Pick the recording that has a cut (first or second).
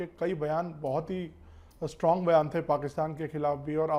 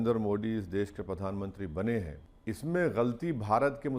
second